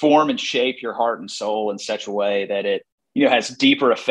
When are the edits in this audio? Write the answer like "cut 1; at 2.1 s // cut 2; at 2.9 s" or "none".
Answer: cut 1; at 3.0 s